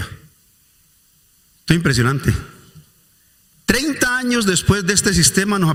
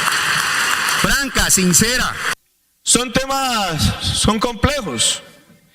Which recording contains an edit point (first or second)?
second